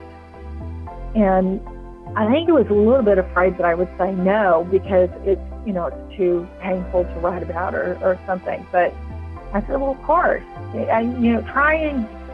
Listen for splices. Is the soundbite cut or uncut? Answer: uncut